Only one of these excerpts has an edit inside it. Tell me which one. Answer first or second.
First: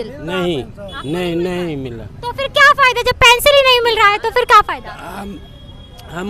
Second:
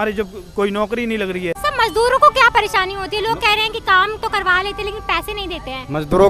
second